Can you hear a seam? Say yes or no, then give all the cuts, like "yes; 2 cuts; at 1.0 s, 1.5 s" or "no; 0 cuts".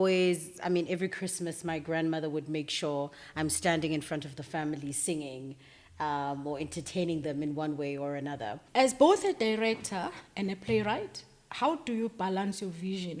yes; 1 cut; at 8.6 s